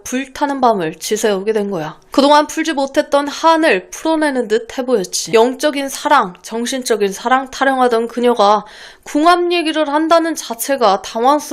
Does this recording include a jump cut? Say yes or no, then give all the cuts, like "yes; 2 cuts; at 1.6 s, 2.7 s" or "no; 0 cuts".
yes; 2 cuts; at 1.9 s, 5.2 s